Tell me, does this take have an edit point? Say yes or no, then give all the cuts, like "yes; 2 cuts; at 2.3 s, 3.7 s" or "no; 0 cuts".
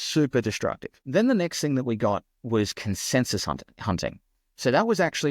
yes; 1 cut; at 0.9 s